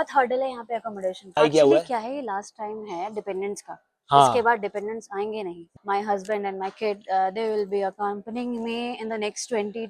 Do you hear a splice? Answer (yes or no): yes